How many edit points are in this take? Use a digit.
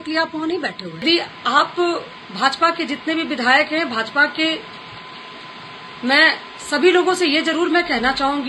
1